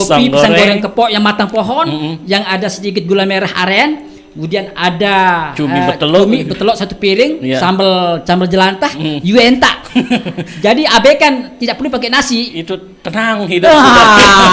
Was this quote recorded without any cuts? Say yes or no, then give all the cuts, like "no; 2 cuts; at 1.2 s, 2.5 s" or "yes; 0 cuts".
yes; 0 cuts